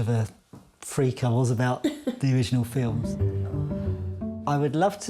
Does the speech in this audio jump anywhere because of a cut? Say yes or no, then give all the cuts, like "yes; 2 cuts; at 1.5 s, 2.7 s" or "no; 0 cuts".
yes; 1 cut; at 3.0 s